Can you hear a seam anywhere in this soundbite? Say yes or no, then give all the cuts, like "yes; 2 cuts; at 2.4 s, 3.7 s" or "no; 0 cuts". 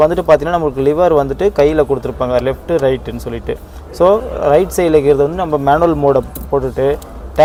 no; 0 cuts